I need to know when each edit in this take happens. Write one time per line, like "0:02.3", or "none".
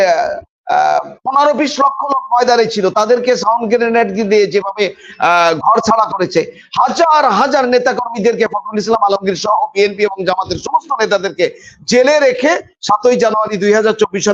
none